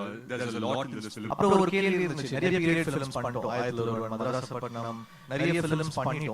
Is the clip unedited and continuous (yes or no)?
no